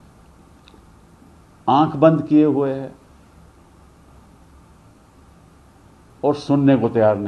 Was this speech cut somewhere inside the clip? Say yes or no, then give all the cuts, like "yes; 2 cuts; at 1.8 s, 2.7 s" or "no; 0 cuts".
no; 0 cuts